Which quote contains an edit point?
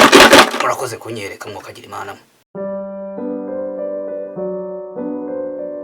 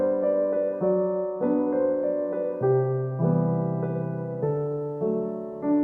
first; 1 cut; at 2.3 s

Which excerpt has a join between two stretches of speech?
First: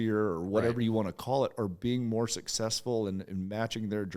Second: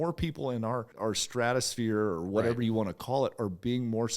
second; 1 cut; at 0.9 s

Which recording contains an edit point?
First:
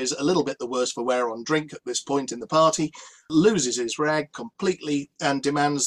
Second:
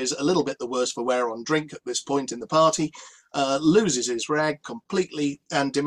first; 1 cut; at 3.3 s

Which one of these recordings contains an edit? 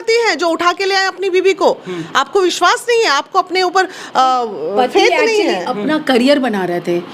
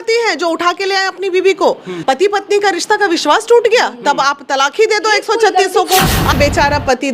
second; 2 cuts; at 1.9 s, 6.3 s

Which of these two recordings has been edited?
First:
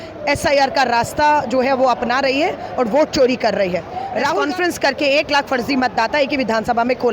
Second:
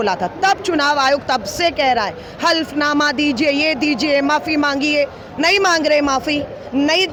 first; 1 cut; at 4.4 s

